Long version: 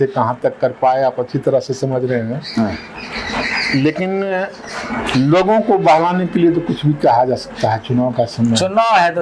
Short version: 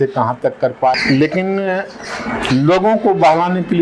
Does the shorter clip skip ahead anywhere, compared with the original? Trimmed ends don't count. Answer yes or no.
yes